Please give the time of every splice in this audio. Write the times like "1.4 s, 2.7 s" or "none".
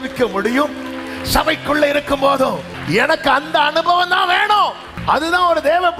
2.7 s, 4.9 s